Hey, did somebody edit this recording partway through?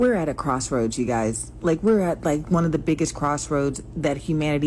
no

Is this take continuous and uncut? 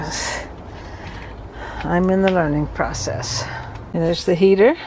no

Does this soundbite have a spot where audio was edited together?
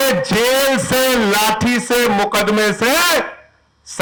no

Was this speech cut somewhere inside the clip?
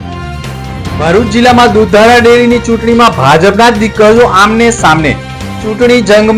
yes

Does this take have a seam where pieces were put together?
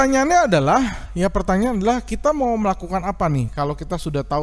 no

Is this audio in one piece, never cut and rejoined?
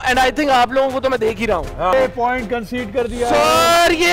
no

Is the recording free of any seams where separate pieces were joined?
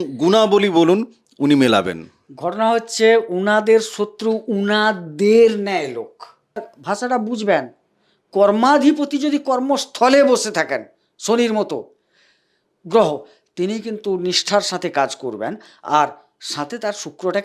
no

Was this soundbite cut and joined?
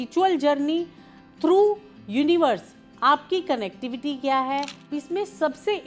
yes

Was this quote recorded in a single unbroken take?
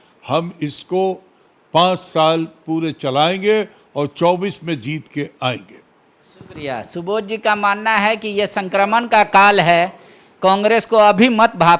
yes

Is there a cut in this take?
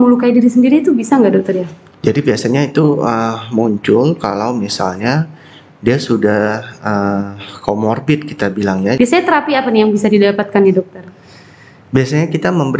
yes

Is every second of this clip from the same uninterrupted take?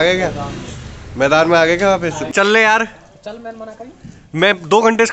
no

